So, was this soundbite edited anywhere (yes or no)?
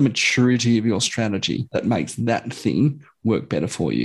yes